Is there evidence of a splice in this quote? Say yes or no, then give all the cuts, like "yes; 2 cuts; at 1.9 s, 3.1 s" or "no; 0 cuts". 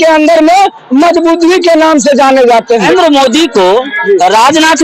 yes; 1 cut; at 2.9 s